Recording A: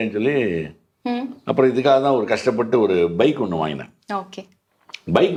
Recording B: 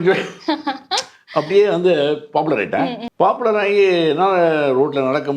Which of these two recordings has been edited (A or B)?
B